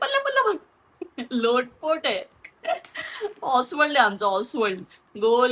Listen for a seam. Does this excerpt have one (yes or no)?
no